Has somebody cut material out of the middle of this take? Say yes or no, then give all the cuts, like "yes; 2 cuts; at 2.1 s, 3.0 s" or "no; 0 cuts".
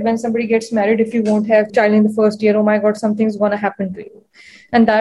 yes; 1 cut; at 1.7 s